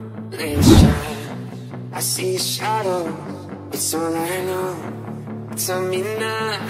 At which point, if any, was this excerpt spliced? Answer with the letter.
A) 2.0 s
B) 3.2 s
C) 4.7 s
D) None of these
D